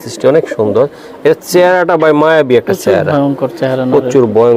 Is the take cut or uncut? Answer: uncut